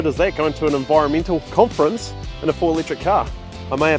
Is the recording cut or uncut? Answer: cut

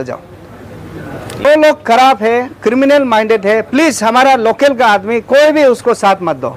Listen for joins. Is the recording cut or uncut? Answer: cut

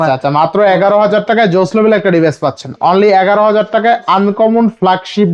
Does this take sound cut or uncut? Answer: uncut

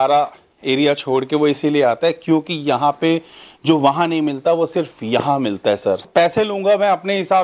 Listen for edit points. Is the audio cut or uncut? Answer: cut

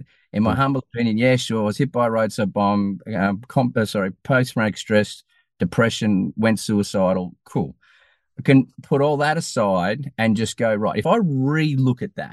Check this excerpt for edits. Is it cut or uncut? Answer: cut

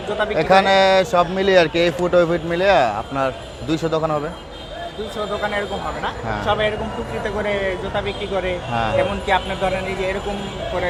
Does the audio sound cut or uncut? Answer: uncut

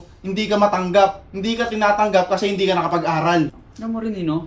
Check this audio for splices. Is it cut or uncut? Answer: cut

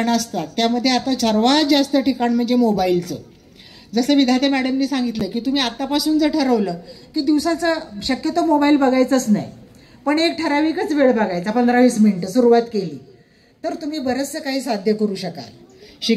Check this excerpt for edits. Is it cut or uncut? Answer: uncut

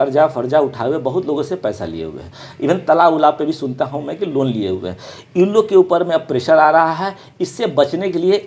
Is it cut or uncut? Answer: uncut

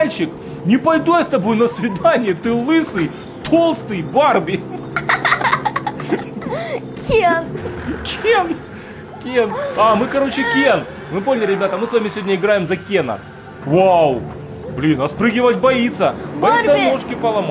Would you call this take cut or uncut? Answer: uncut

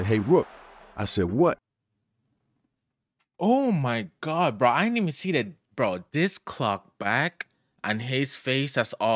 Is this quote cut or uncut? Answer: cut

